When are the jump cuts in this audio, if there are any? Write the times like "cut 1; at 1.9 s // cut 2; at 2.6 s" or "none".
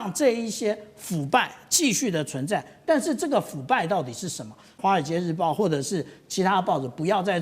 cut 1; at 4.7 s

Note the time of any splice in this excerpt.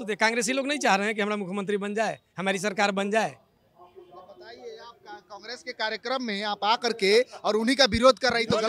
none

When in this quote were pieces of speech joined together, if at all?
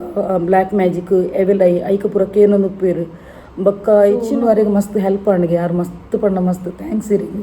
cut 1; at 4.3 s

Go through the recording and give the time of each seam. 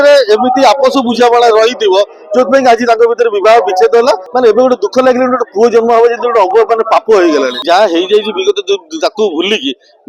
cut 1; at 4.3 s // cut 2; at 7.5 s

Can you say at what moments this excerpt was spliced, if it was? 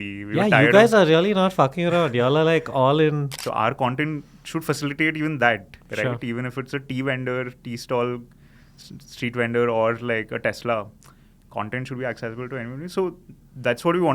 cut 1; at 3.3 s

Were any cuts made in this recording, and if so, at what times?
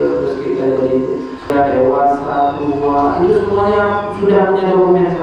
cut 1; at 1.5 s

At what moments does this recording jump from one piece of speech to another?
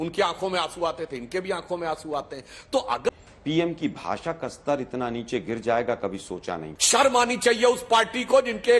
cut 1; at 3.1 s // cut 2; at 6.7 s

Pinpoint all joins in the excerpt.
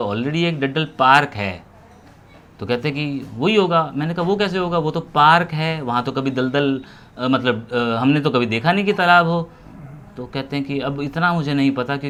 none

